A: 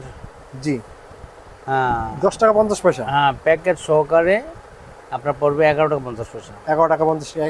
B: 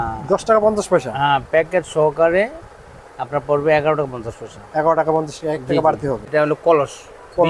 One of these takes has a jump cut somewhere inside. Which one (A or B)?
B